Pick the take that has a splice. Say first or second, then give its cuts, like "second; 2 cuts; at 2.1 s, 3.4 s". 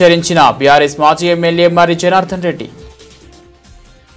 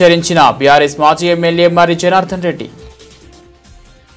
second; 1 cut; at 2.7 s